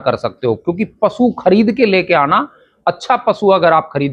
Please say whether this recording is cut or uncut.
uncut